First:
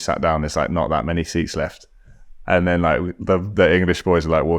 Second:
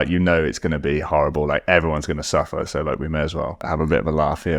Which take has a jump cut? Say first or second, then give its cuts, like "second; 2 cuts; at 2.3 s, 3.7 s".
second; 1 cut; at 3.6 s